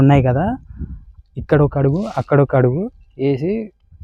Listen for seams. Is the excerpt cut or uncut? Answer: uncut